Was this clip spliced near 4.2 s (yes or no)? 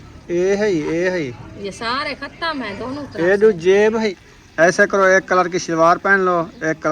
yes